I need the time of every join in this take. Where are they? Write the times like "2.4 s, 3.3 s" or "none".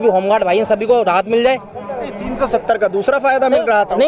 none